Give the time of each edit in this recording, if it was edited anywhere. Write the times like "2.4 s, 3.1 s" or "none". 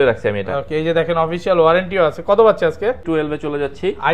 3.0 s